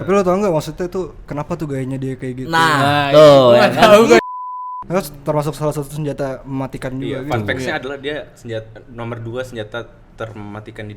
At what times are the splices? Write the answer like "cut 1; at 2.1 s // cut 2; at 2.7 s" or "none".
cut 1; at 4.2 s